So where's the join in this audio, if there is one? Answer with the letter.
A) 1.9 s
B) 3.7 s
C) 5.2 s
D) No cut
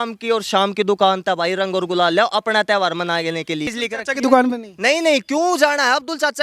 B